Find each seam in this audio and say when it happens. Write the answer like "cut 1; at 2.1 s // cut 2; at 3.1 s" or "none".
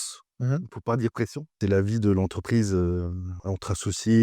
cut 1; at 1.5 s // cut 2; at 3.3 s